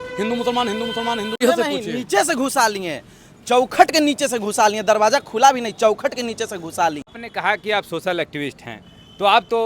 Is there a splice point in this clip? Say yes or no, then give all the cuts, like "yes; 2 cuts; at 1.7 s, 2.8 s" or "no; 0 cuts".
yes; 2 cuts; at 1.4 s, 7.1 s